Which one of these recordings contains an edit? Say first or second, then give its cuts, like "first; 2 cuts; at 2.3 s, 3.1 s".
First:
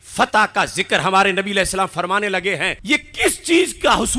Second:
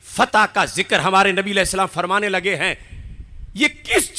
first; 1 cut; at 2.8 s